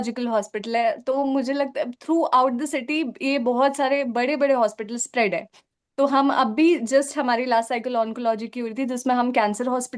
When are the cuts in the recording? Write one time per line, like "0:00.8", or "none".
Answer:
none

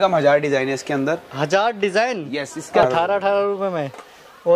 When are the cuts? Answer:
0:02.8

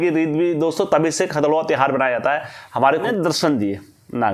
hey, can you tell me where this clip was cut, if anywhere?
0:03.0

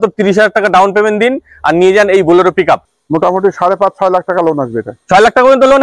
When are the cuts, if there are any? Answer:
0:02.9

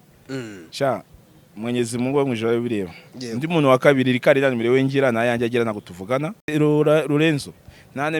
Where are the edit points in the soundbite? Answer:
none

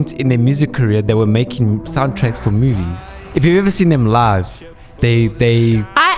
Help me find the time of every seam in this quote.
0:03.3

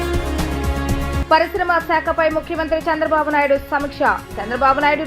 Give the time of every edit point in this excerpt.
0:01.2

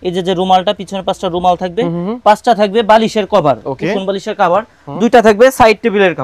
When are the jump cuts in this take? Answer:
none

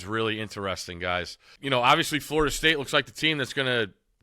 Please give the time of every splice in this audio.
0:01.5

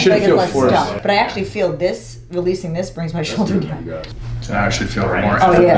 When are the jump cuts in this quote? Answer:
0:00.9
0:04.1

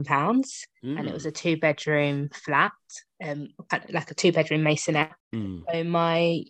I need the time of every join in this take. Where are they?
0:05.2

